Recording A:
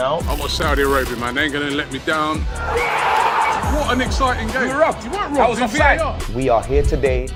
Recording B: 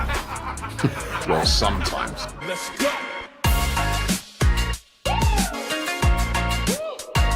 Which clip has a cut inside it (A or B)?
B